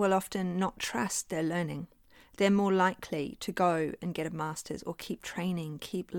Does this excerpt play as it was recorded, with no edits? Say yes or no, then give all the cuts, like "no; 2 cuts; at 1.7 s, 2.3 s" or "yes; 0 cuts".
yes; 0 cuts